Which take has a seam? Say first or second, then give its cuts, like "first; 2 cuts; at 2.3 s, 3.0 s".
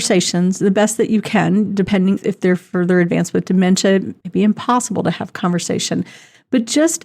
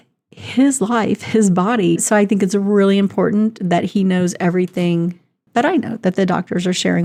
first; 1 cut; at 4.2 s